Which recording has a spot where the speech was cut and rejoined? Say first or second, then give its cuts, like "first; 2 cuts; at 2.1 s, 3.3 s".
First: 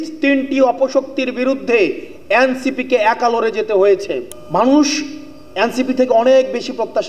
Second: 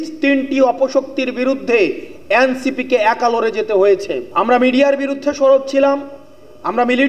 first; 1 cut; at 4.3 s